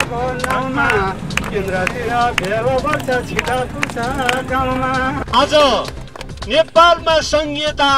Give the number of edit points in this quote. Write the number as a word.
one